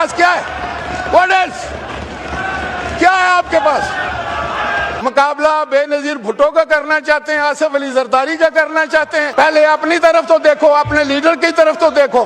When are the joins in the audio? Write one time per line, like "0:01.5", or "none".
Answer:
0:04.9
0:09.3